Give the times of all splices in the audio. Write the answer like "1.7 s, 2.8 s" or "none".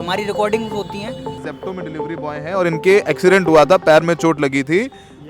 1.4 s